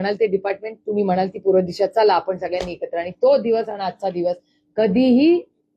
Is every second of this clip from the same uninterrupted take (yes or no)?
yes